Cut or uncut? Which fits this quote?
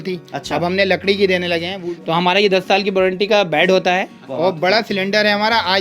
cut